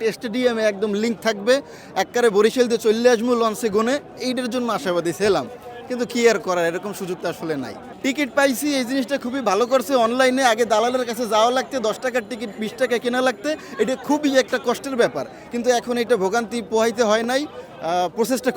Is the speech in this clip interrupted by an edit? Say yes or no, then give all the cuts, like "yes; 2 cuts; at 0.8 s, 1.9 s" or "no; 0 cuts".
no; 0 cuts